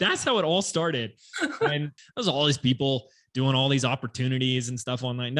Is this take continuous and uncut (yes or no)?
no